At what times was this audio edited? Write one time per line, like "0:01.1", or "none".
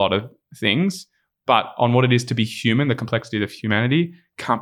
0:03.6